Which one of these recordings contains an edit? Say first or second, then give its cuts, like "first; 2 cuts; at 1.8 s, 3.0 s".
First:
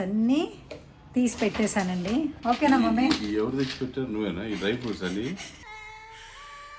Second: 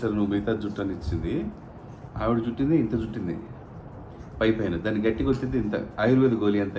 first; 1 cut; at 2.3 s